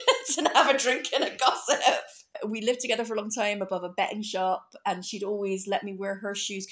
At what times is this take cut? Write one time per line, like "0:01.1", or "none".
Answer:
none